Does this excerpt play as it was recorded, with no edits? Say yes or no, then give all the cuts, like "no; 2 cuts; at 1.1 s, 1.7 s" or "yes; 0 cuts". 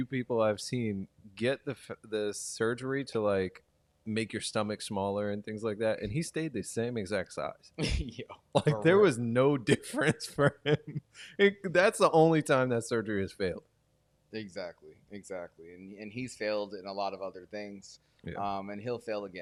yes; 0 cuts